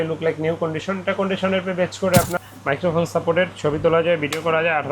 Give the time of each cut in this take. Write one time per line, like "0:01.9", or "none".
0:02.3